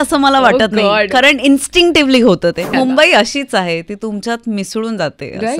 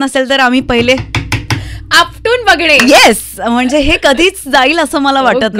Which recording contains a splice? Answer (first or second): first